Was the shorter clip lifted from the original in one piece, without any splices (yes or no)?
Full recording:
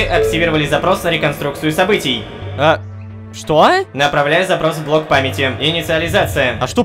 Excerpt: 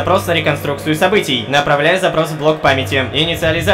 no